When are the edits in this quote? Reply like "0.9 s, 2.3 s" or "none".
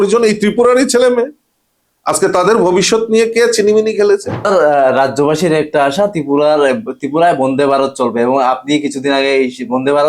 4.3 s